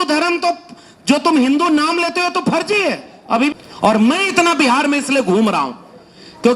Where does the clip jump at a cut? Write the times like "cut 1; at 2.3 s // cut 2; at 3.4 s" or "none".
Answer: cut 1; at 3.5 s